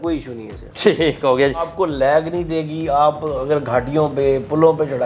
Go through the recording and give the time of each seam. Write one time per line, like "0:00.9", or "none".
0:01.7